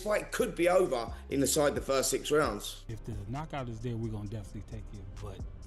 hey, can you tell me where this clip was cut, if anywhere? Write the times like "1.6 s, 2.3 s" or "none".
2.6 s